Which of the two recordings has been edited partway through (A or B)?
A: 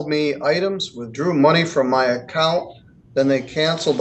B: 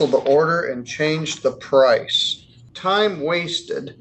B